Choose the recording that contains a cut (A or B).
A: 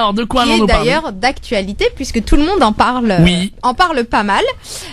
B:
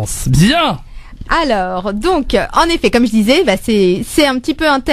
A